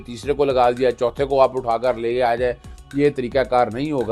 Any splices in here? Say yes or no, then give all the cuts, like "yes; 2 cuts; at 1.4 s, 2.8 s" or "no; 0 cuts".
no; 0 cuts